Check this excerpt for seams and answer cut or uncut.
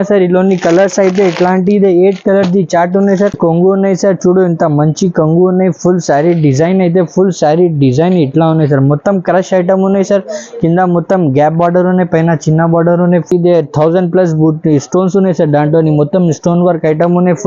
cut